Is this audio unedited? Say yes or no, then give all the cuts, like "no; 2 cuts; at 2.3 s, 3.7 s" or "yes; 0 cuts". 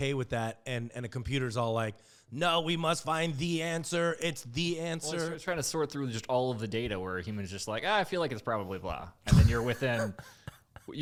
yes; 0 cuts